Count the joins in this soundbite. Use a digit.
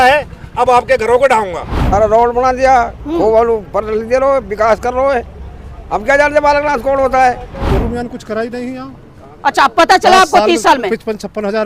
2